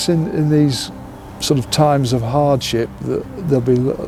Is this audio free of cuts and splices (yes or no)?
yes